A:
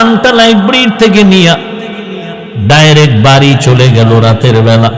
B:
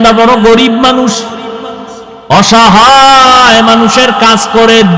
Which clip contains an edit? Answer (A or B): B